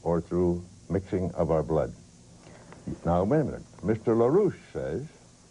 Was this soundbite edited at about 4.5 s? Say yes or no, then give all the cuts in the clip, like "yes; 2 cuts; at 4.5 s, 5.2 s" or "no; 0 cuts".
no; 1 cut; at 2.0 s